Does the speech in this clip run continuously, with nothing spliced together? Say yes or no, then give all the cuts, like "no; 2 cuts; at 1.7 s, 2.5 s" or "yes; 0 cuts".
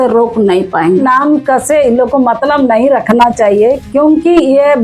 no; 1 cut; at 1.0 s